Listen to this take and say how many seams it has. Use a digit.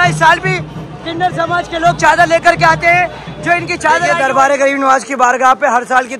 1